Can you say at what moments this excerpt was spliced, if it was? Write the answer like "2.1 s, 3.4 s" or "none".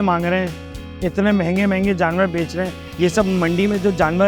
2.8 s